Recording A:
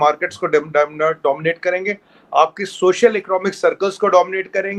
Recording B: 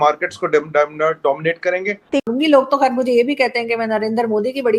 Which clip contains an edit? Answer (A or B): B